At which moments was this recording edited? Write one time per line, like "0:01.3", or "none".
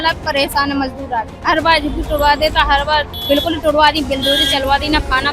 0:01.3
0:03.1